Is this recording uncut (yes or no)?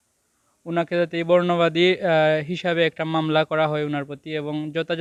yes